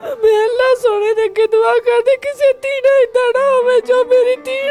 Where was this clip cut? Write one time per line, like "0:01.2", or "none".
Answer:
none